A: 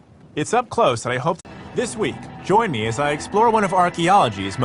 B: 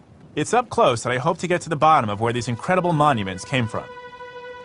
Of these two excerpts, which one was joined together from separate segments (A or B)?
B